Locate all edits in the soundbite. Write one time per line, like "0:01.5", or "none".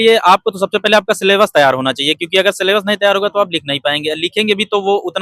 none